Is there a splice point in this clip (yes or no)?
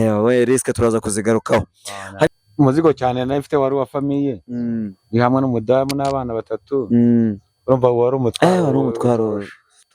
yes